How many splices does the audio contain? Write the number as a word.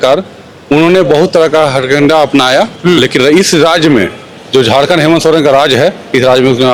zero